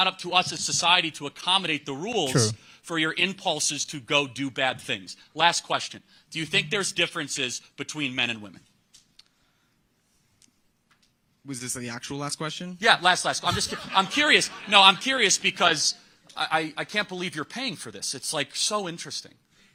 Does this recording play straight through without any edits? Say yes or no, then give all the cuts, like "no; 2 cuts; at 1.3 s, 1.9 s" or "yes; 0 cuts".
yes; 0 cuts